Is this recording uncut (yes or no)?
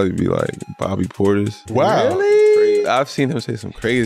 no